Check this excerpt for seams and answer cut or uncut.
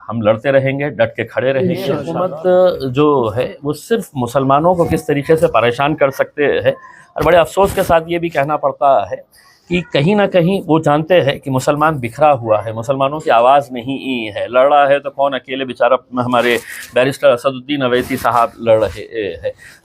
cut